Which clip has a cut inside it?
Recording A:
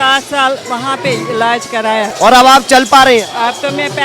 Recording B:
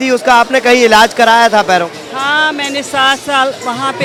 A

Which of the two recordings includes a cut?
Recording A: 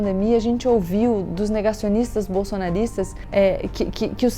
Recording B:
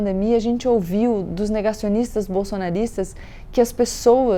A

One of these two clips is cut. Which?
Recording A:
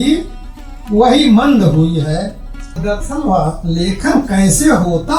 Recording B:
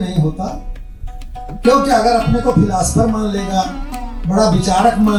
A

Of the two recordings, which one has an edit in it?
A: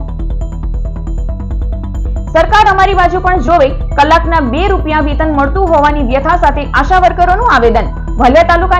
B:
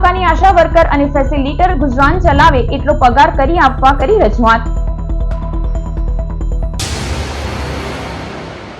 B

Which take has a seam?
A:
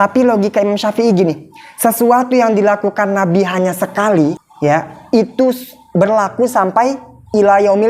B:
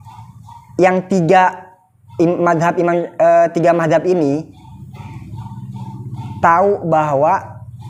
A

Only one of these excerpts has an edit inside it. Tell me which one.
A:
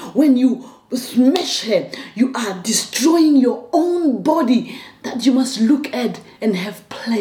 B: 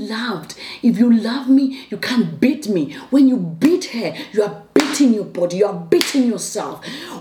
A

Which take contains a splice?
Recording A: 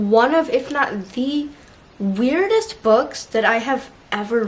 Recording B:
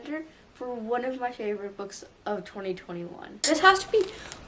B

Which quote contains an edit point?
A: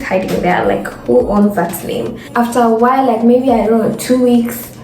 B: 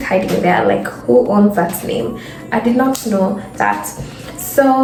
A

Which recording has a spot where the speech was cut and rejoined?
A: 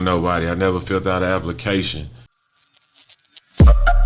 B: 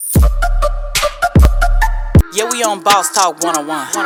A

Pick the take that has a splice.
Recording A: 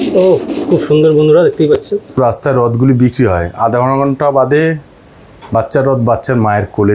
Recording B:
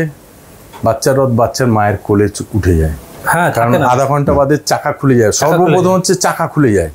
A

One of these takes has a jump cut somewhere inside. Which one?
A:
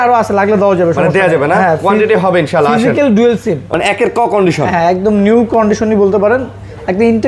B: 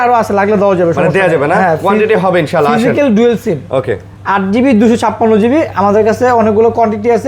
A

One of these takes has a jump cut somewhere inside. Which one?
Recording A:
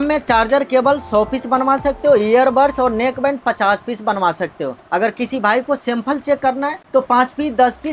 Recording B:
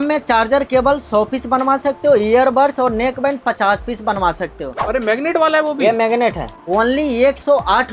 B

